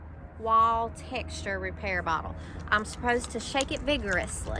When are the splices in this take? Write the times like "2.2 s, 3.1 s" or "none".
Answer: none